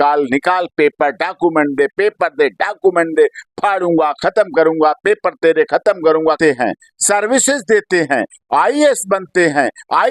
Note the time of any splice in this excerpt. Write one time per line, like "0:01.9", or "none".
0:06.4